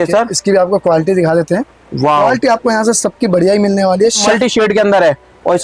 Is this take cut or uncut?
cut